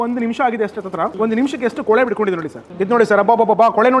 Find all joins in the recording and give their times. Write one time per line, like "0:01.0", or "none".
0:01.1
0:02.6